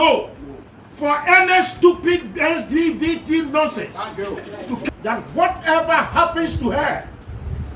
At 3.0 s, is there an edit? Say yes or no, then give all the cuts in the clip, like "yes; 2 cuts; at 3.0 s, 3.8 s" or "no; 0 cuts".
no; 1 cut; at 4.8 s